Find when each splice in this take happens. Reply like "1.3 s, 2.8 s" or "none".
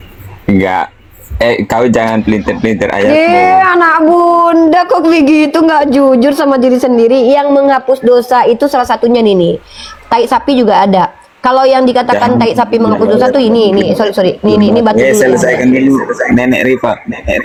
none